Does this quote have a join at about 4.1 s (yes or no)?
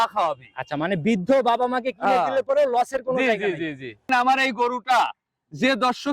yes